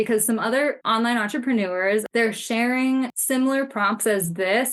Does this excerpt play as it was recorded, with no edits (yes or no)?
no